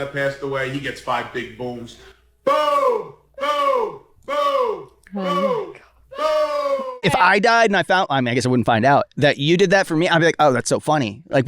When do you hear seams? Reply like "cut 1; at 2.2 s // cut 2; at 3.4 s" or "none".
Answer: cut 1; at 7.0 s